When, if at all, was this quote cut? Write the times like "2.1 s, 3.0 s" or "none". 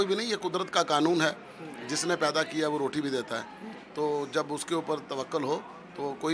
none